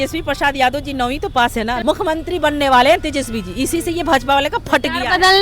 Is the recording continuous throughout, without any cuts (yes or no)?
no